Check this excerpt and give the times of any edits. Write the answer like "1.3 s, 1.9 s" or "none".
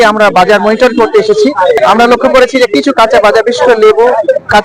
1.8 s